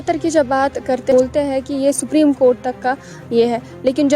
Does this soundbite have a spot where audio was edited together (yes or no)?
yes